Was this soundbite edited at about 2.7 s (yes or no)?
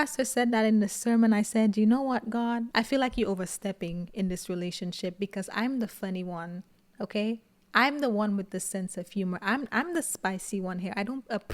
yes